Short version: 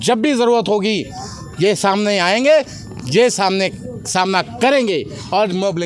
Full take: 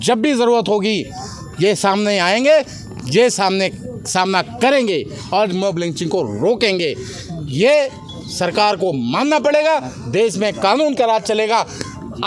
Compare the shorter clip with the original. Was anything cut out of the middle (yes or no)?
no